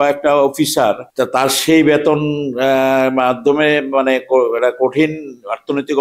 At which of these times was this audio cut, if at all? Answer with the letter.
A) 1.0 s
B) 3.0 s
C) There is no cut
A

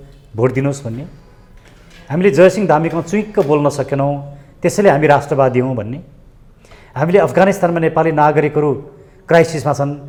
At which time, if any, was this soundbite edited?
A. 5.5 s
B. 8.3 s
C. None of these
C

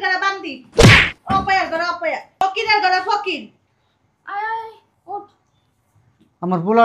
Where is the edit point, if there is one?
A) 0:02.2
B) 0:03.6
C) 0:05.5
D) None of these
D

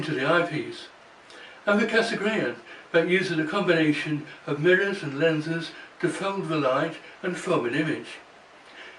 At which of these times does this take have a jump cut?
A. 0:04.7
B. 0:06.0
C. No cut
C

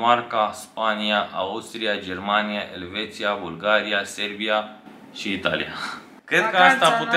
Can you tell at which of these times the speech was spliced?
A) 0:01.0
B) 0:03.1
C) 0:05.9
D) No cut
C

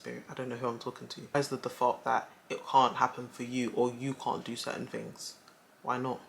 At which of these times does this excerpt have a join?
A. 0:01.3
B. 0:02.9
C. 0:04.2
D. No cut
A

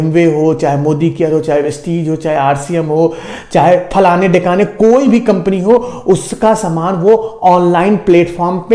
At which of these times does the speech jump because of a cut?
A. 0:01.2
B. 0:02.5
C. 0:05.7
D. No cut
D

